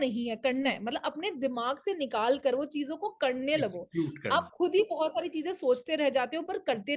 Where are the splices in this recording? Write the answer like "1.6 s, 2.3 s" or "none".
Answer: none